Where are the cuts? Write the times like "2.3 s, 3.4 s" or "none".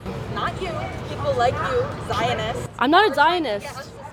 none